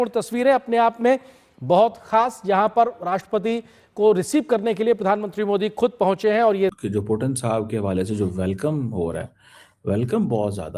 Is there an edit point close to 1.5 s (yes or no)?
no